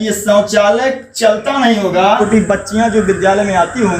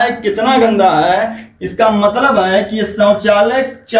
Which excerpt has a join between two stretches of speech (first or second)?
first